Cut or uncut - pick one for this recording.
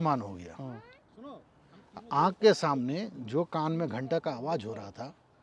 uncut